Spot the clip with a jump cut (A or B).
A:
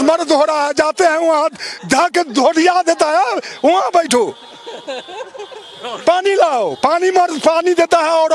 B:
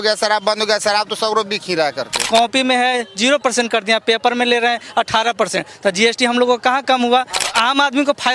B